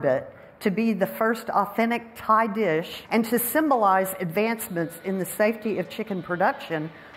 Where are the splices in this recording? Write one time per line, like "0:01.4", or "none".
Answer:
none

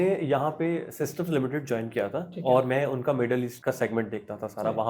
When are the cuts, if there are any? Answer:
0:03.5

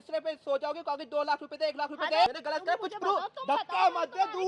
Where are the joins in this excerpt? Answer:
0:02.3

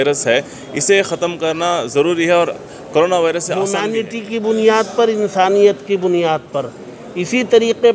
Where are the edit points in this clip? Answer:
0:03.7

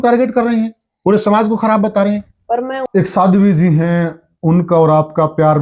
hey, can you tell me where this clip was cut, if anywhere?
0:02.8

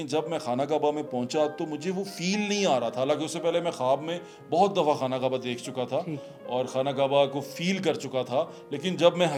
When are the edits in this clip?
none

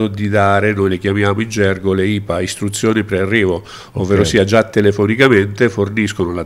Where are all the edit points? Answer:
none

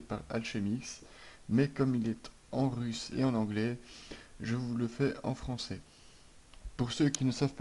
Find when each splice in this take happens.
0:05.3

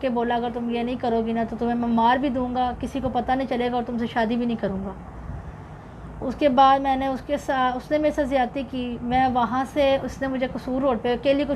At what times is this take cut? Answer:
none

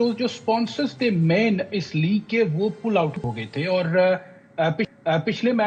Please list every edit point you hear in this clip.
none

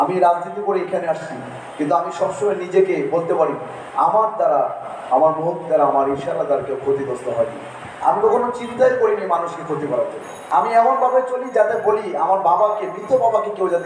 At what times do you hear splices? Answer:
0:10.3

